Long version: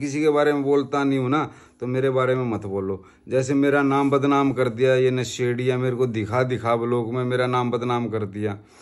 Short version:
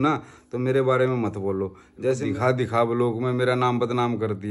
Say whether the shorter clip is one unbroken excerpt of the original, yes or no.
no